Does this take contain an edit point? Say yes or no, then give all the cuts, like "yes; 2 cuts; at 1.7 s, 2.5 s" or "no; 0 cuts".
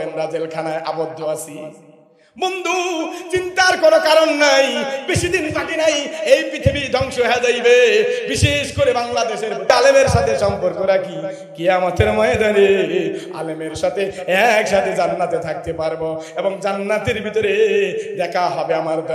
yes; 1 cut; at 9.7 s